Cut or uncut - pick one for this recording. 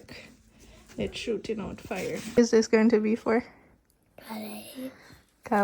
cut